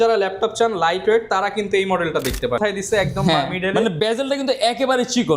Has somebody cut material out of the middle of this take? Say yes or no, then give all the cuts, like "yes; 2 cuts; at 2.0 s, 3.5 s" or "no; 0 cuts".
yes; 1 cut; at 2.6 s